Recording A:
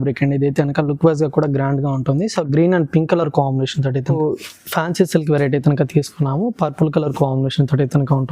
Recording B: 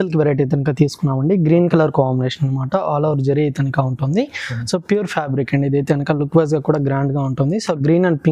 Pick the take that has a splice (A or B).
A